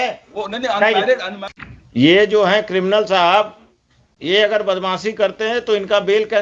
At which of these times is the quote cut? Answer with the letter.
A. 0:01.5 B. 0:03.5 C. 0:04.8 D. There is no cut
A